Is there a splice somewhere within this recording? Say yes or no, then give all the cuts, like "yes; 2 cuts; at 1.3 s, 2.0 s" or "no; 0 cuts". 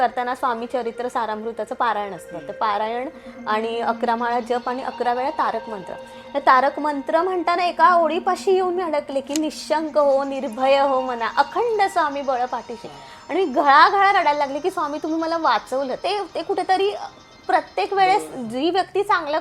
yes; 1 cut; at 16.0 s